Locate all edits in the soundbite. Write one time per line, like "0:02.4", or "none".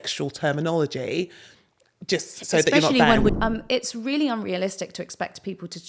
0:03.3